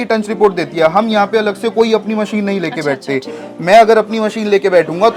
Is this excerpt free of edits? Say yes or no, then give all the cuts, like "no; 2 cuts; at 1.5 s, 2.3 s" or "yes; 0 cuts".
yes; 0 cuts